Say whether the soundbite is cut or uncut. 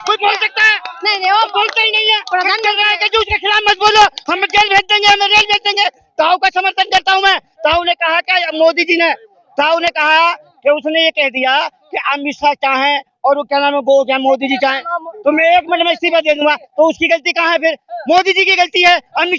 uncut